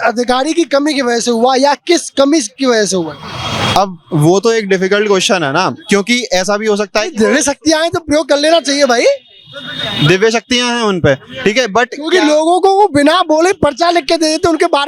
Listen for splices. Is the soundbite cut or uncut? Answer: uncut